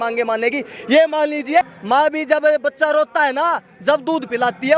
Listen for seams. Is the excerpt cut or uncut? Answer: cut